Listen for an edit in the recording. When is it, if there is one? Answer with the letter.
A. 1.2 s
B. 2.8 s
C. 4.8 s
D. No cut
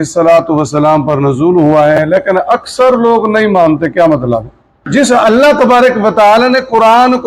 C